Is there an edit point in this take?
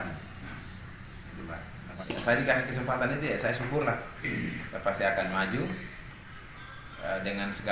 yes; 1 cut; at 2.0 s

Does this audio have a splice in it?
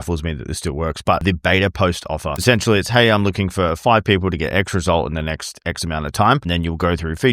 yes; 3 cuts; at 1.2 s, 2.4 s, 6.5 s

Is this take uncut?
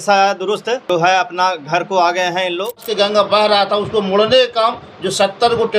no; 2 cuts; at 0.8 s, 2.9 s

